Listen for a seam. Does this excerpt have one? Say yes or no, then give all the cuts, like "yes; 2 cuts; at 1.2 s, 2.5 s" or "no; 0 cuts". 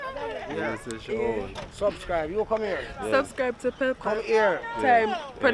no; 0 cuts